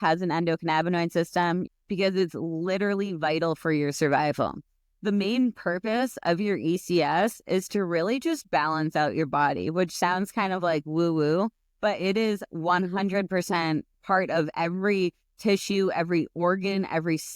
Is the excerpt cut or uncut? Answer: cut